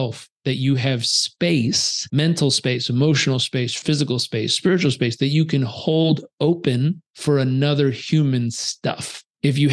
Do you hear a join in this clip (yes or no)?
yes